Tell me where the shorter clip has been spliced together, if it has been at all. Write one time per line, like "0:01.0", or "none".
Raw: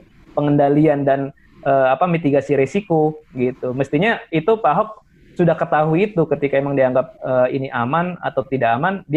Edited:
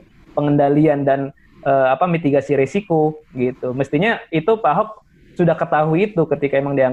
none